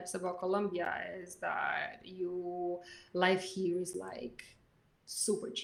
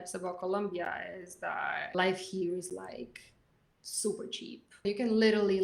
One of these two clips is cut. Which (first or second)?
second